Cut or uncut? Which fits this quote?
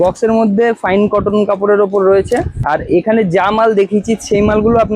cut